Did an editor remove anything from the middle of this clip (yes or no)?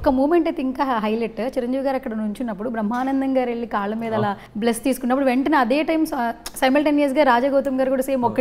yes